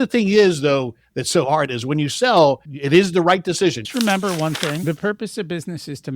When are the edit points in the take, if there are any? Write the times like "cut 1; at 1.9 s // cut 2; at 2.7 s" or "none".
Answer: cut 1; at 2.7 s // cut 2; at 3.8 s